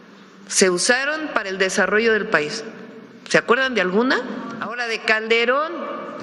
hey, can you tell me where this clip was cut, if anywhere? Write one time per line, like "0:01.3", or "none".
0:04.7